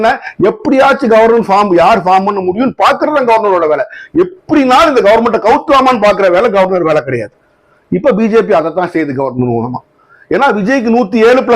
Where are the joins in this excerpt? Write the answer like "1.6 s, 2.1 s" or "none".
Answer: none